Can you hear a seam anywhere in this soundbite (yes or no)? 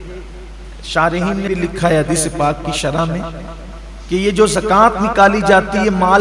yes